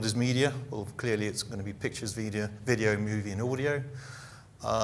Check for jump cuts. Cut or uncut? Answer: cut